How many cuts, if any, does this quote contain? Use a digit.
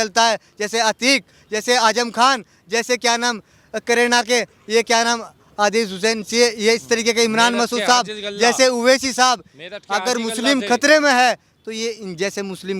0